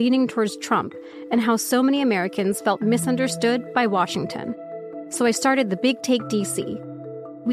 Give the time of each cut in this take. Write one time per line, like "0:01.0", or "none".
none